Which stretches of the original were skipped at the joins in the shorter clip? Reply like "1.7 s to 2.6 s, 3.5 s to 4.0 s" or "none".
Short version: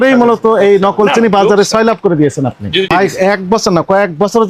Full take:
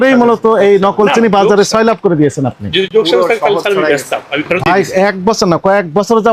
2.9 s to 4.6 s